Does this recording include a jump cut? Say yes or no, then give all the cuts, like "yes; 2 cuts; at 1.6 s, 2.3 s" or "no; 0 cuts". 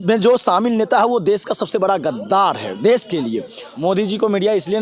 yes; 1 cut; at 3.6 s